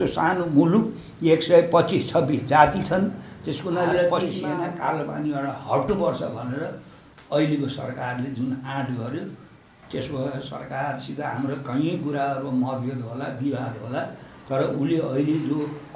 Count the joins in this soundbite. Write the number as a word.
one